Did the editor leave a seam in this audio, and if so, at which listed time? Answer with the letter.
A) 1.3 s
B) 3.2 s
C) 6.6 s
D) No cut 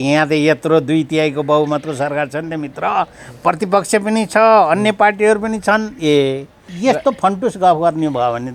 C